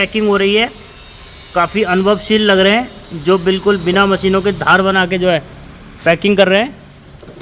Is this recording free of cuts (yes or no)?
yes